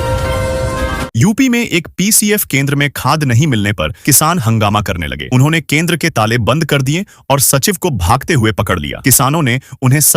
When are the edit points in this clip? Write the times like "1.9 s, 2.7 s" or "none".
1.1 s